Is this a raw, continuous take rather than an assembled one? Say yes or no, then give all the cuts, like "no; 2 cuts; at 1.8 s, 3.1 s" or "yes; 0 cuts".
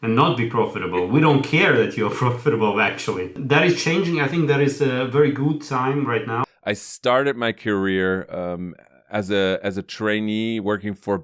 no; 2 cuts; at 3.4 s, 6.4 s